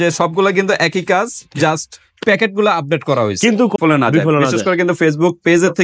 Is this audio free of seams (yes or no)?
no